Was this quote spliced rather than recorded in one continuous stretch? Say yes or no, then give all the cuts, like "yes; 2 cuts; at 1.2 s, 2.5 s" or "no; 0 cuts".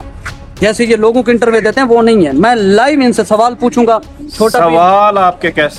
no; 0 cuts